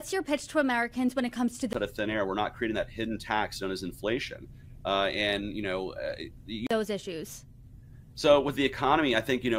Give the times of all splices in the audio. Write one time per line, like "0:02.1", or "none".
none